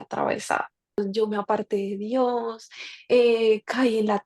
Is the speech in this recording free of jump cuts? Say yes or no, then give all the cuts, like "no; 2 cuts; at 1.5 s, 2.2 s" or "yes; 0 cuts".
no; 1 cut; at 1.0 s